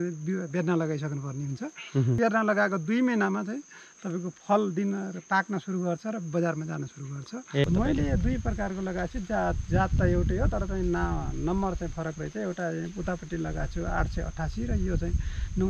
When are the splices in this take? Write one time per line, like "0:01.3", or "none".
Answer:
0:02.2
0:07.6